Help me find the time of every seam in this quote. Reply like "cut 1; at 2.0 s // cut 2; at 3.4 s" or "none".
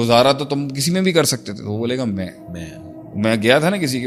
none